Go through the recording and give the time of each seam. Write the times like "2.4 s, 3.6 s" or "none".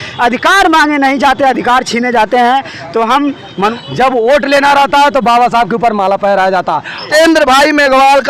3.7 s, 7.0 s